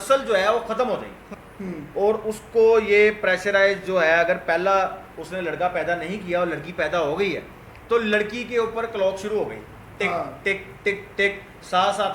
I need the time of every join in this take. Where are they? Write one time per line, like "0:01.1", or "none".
0:01.2

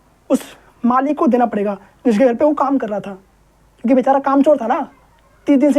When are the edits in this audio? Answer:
none

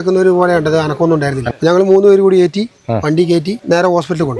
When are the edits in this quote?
0:01.5
0:03.6

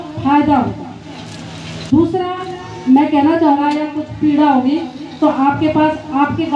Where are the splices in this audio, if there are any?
0:03.6

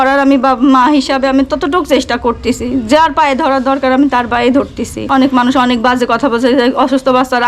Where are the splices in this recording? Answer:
0:05.0

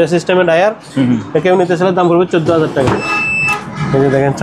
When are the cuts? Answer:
0:03.1

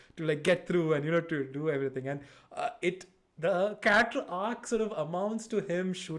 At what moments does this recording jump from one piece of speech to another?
none

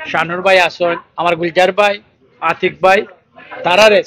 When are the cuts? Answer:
none

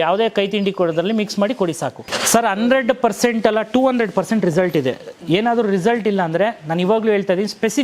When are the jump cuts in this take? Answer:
0:02.0

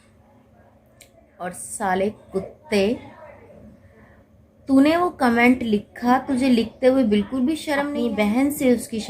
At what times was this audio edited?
0:01.3
0:07.9

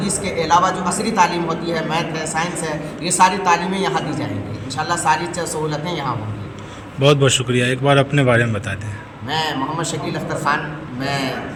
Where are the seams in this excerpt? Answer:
none

